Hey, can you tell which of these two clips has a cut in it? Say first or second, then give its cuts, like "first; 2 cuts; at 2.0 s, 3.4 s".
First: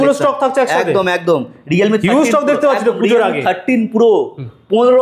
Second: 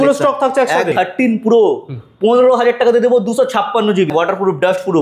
second; 2 cuts; at 0.9 s, 4.1 s